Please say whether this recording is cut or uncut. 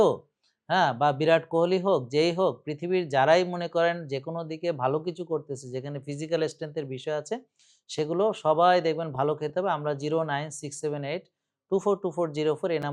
uncut